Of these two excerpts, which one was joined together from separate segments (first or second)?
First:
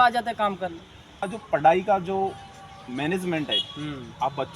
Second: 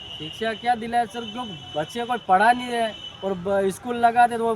first